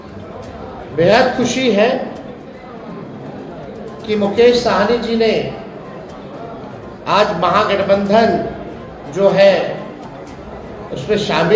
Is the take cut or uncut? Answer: uncut